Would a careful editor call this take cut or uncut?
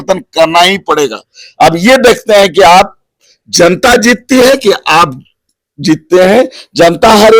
uncut